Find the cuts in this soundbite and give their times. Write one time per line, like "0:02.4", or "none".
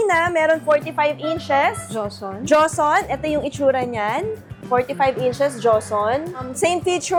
none